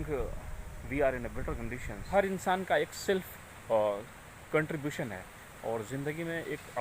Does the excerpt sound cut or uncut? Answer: cut